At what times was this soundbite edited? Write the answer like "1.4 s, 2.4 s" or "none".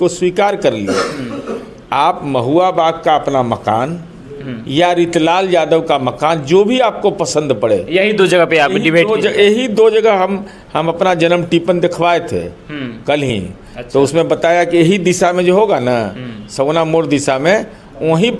none